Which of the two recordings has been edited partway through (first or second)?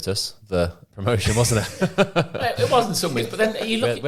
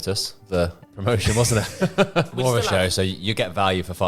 second